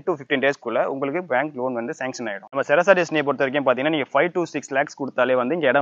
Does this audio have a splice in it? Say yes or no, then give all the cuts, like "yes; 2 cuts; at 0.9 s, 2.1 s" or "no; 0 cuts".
yes; 1 cut; at 2.4 s